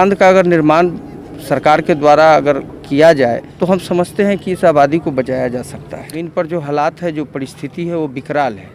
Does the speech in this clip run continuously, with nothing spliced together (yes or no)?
no